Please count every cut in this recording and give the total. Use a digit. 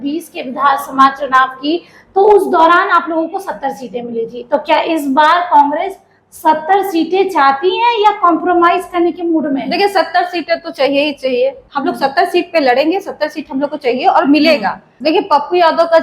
2